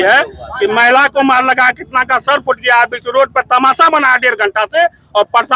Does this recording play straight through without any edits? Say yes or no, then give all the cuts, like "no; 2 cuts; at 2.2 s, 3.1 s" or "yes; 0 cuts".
yes; 0 cuts